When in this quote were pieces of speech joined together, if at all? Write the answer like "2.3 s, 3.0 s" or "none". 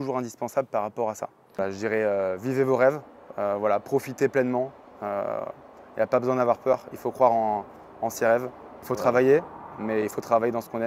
1.6 s, 8.8 s